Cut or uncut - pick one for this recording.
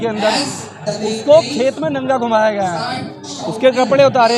uncut